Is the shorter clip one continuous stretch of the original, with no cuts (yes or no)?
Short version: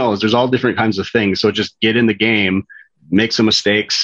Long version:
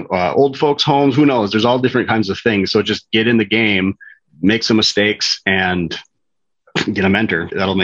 yes